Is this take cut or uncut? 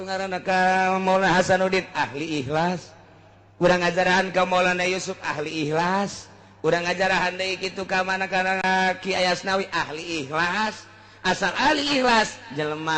cut